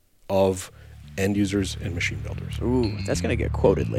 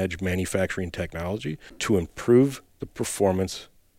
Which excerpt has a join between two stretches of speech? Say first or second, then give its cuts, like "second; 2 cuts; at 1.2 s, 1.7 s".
second; 1 cut; at 1.7 s